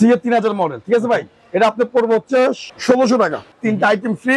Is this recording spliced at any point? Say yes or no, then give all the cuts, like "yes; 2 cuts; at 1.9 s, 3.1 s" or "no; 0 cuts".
yes; 2 cuts; at 2.7 s, 3.5 s